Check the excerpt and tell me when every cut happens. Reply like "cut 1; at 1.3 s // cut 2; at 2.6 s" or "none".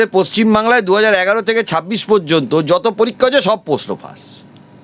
none